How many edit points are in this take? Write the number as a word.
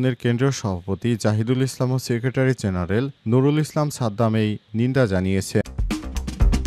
one